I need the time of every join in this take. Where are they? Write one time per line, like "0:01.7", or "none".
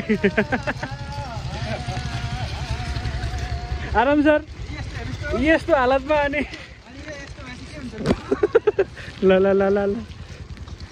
none